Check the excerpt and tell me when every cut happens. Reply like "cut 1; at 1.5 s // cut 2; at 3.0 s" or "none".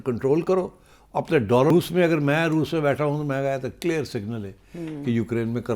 cut 1; at 1.7 s